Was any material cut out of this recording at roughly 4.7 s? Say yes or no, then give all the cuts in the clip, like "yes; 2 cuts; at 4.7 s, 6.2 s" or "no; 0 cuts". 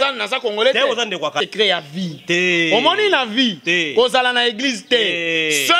no; 1 cut; at 1.4 s